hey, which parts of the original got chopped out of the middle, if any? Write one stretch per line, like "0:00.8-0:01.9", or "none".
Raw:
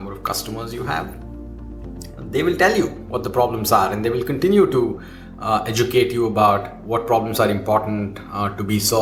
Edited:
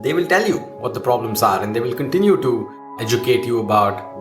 0:05.3-0:05.7